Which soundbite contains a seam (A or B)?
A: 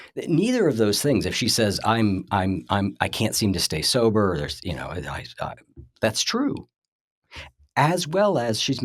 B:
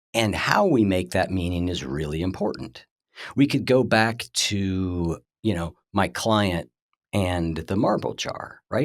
B